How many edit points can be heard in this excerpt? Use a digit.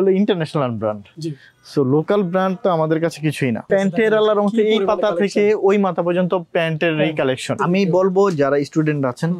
2